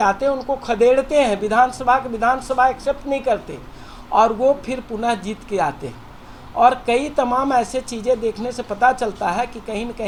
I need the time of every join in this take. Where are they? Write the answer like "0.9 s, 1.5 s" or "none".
none